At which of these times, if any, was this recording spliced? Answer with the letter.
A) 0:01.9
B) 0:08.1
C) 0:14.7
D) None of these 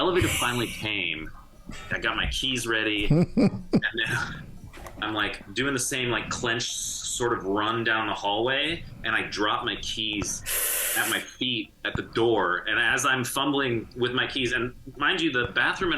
A